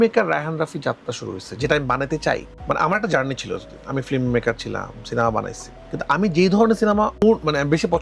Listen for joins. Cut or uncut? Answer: uncut